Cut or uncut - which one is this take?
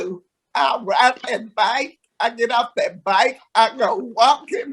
uncut